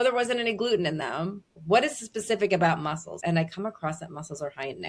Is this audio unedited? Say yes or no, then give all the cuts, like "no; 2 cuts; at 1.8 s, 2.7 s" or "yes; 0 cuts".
no; 2 cuts; at 1.5 s, 3.2 s